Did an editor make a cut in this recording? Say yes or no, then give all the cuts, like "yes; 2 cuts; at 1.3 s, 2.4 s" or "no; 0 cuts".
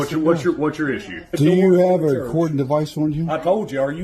yes; 1 cut; at 1.3 s